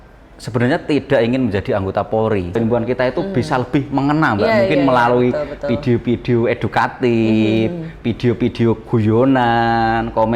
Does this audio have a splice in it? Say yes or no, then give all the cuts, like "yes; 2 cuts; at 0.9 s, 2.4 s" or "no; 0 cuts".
yes; 1 cut; at 2.6 s